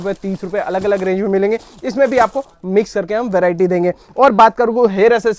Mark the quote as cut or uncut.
uncut